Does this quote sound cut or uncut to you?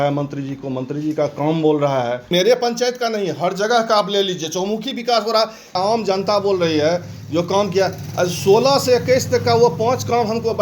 cut